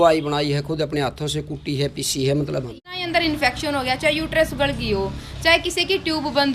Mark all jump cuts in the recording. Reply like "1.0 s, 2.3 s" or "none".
2.7 s